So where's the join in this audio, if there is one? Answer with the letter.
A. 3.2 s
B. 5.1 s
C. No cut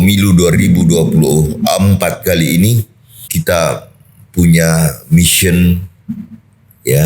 A